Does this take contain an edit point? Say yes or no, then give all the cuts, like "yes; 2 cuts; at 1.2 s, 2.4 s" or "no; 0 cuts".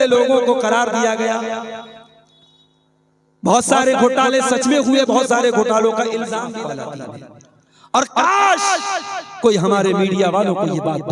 yes; 1 cut; at 6.6 s